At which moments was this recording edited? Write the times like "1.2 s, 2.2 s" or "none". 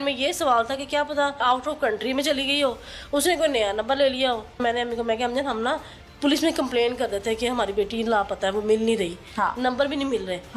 1.4 s, 4.6 s